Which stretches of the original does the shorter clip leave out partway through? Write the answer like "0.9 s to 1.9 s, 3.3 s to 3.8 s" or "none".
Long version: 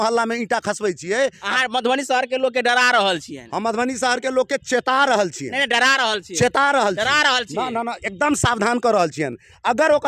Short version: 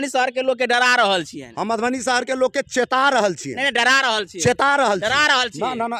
none

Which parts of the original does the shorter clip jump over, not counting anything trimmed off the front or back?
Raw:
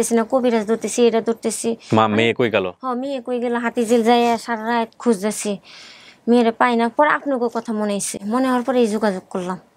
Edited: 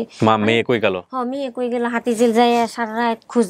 none

